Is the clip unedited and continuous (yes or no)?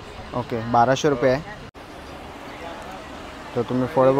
no